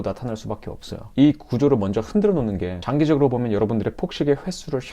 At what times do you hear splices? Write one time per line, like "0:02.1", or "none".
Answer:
0:01.0
0:02.8